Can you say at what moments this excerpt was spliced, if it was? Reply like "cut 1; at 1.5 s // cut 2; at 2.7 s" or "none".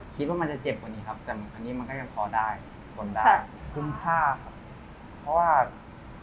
cut 1; at 3.5 s